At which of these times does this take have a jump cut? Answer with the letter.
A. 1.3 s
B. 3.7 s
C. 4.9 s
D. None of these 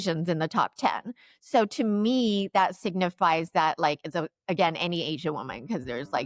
D